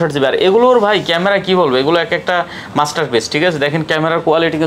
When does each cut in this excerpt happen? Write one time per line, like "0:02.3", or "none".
none